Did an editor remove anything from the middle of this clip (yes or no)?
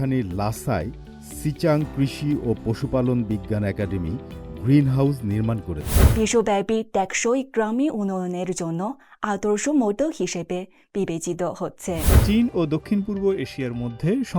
yes